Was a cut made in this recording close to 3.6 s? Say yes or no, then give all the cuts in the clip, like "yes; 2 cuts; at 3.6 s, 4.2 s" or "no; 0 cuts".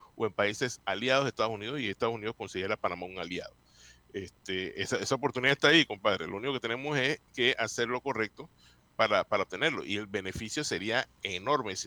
no; 0 cuts